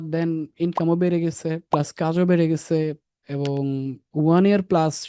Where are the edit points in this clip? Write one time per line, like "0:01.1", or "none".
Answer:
0:01.6
0:04.0